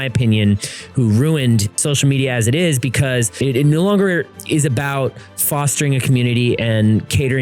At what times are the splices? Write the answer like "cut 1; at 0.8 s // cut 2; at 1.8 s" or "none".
cut 1; at 1.8 s // cut 2; at 3.4 s